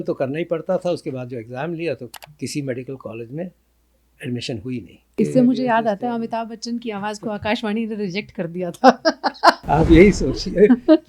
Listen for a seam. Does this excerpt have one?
yes; 2 cuts; at 5.1 s, 9.6 s

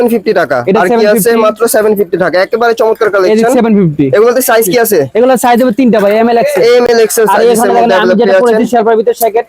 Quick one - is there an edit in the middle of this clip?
no; 0 cuts

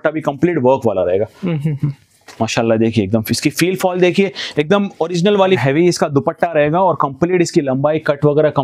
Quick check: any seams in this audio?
yes; 1 cut; at 5.6 s

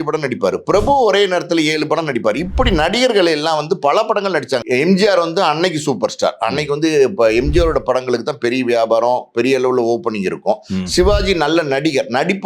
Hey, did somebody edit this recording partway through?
yes; 1 cut; at 4.6 s

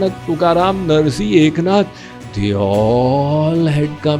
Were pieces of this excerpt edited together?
no; 0 cuts

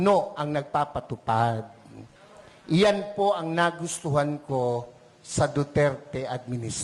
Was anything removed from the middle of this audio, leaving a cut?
no; 0 cuts

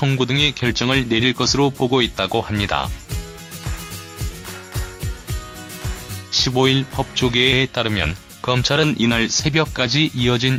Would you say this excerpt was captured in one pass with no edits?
yes; 0 cuts

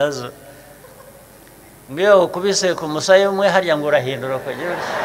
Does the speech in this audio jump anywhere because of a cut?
no; 0 cuts

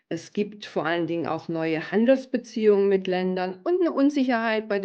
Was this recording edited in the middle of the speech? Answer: no; 0 cuts

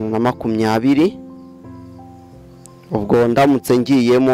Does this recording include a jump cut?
no; 0 cuts

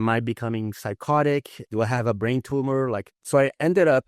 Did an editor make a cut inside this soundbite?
yes; 2 cuts; at 1.6 s, 3.1 s

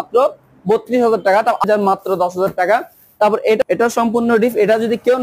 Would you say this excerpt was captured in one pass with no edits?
no; 2 cuts; at 1.6 s, 3.6 s

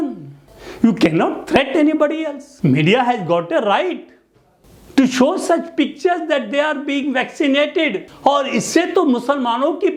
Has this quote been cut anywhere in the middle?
no; 0 cuts

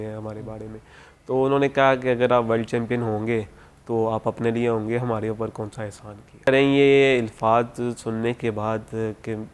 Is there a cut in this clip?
yes; 1 cut; at 6.5 s

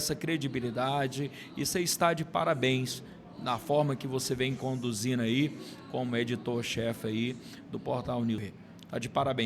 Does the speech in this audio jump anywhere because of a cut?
yes; 1 cut; at 8.4 s

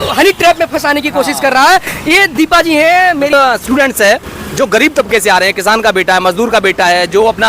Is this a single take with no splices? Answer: no; 1 cut; at 3.3 s

